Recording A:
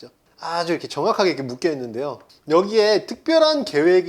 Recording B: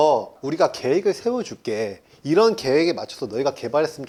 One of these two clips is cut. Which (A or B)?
A